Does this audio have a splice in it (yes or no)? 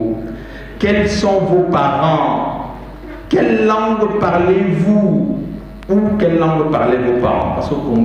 no